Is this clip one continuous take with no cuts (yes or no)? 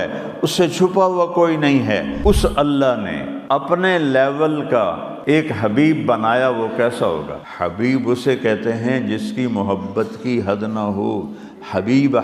no